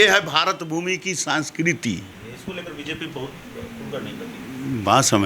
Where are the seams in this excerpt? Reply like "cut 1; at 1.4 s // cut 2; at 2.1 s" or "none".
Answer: cut 1; at 2.1 s

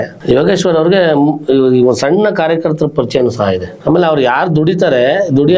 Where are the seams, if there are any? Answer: none

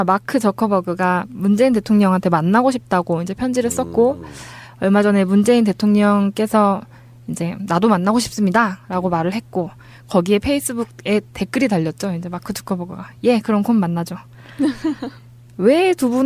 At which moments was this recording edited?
none

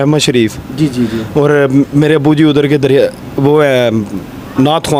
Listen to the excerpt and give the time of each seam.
none

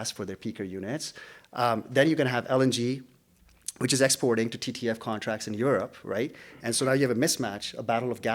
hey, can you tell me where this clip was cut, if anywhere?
cut 1; at 2.4 s

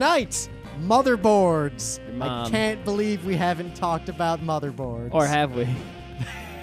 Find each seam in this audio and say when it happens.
none

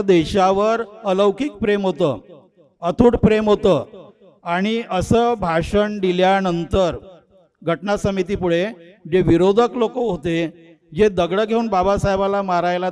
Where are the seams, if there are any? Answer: none

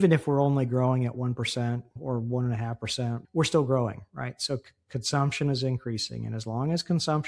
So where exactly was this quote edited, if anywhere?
cut 1; at 2.0 s // cut 2; at 3.2 s

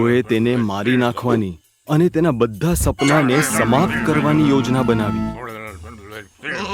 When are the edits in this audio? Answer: none

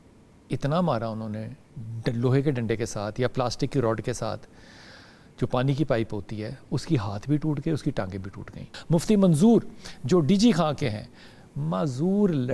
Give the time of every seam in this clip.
cut 1; at 8.7 s

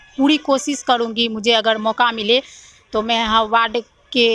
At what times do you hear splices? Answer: none

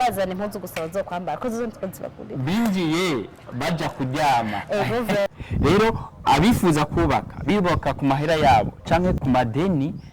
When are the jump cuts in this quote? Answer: cut 1; at 5.3 s // cut 2; at 9.2 s

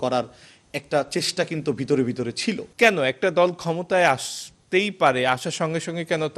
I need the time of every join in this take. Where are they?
cut 1; at 2.7 s

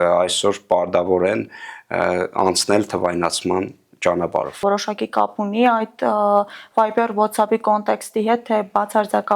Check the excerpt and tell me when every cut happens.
cut 1; at 4.6 s

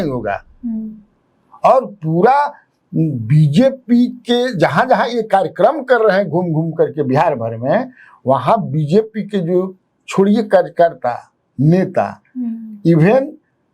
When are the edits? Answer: none

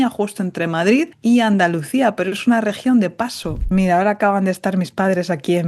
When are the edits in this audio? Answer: cut 1; at 1.1 s // cut 2; at 3.7 s

